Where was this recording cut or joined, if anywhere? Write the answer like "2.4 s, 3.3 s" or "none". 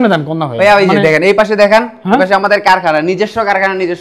none